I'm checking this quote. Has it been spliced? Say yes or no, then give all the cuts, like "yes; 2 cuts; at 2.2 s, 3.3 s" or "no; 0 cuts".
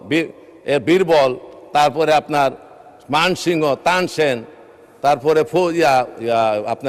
no; 0 cuts